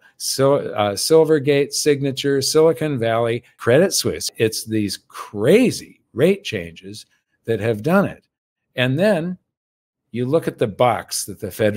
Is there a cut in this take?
yes; 2 cuts; at 3.5 s, 4.3 s

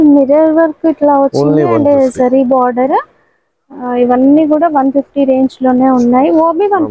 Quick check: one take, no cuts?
yes; 0 cuts

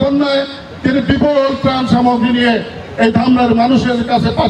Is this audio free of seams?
yes; 0 cuts

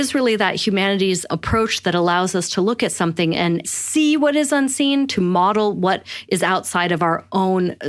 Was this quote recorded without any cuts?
no; 2 cuts; at 1.3 s, 3.7 s

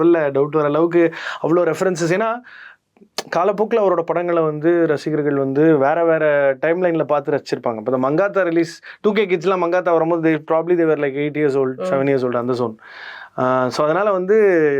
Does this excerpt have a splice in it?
no; 0 cuts

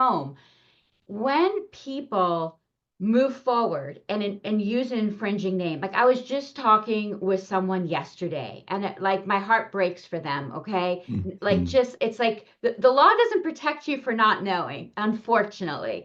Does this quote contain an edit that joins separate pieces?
no; 0 cuts

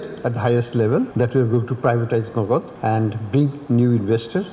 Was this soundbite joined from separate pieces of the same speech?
yes; 2 cuts; at 1.1 s, 2.7 s

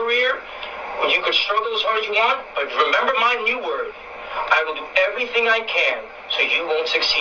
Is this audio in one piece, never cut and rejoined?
yes; 0 cuts

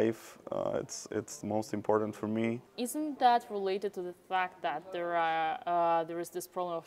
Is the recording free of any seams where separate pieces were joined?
no; 1 cut; at 2.7 s

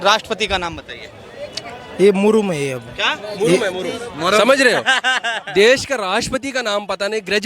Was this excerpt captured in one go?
yes; 0 cuts

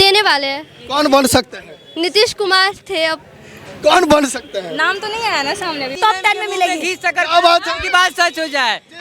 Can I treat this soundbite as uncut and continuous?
no; 1 cut; at 5.9 s

